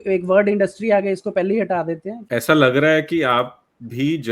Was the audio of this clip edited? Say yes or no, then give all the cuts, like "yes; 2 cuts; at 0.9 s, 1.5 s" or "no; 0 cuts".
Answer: yes; 1 cut; at 2.2 s